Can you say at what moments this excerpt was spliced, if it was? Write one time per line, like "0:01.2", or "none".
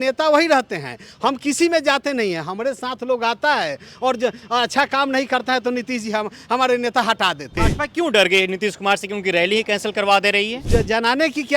0:07.5
0:10.6